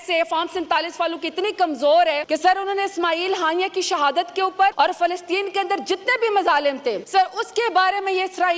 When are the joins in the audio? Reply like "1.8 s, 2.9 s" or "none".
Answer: 2.2 s, 4.7 s, 7.0 s